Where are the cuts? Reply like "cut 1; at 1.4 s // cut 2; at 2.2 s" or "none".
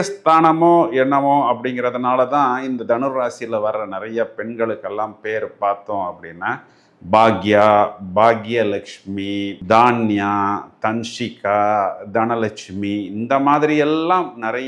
none

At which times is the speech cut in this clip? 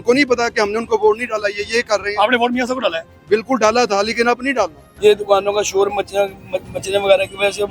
cut 1; at 4.8 s

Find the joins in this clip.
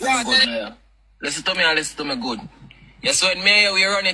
cut 1; at 2.8 s

